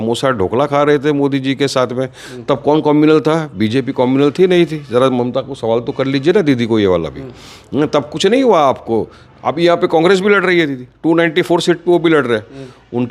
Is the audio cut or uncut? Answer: uncut